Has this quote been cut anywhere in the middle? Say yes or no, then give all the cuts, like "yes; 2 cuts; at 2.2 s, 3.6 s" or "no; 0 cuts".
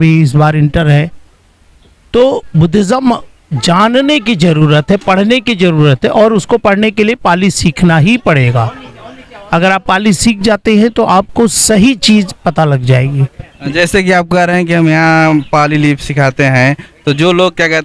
no; 0 cuts